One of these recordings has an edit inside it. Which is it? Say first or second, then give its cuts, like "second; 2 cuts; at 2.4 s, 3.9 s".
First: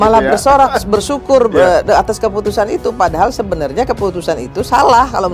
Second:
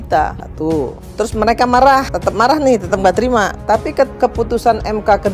second; 2 cuts; at 2.2 s, 4.1 s